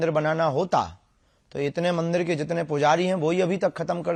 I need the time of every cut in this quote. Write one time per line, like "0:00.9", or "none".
none